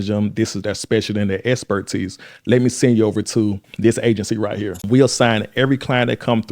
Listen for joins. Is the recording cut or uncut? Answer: cut